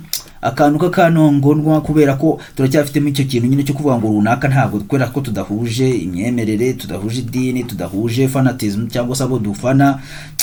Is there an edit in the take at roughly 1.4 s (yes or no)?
no